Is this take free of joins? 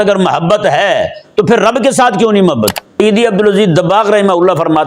no; 1 cut; at 3.0 s

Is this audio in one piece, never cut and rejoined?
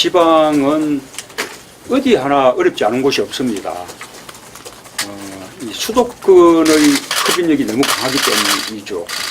no; 1 cut; at 3.7 s

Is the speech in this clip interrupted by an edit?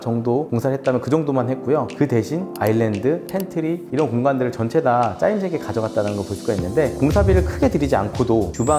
yes; 1 cut; at 6.9 s

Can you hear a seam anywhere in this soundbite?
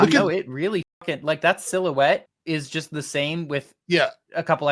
yes; 1 cut; at 2.3 s

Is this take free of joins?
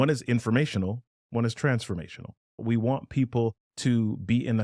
no; 2 cuts; at 2.5 s, 3.7 s

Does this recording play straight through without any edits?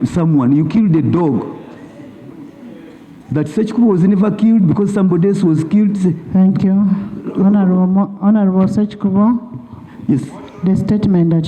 yes; 0 cuts

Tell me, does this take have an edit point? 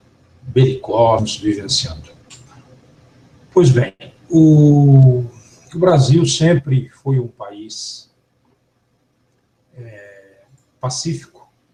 no; 0 cuts

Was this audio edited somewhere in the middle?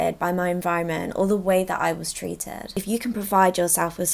yes; 1 cut; at 2.7 s

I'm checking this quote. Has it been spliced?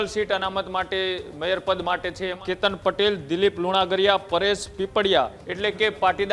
yes; 2 cuts; at 2.4 s, 5.4 s

